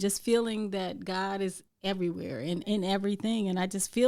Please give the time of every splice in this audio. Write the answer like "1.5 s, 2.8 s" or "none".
1.7 s, 2.6 s